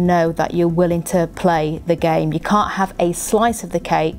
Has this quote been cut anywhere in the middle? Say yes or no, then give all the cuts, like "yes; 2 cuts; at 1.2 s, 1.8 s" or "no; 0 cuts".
no; 0 cuts